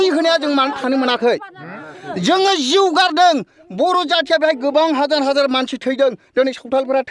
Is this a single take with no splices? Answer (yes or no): yes